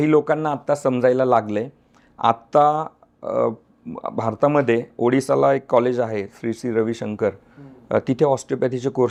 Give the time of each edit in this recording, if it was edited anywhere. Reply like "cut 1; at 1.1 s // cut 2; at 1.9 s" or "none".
none